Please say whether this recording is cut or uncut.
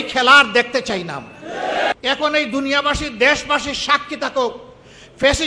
cut